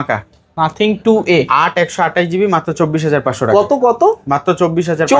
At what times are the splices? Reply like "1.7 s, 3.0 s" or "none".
none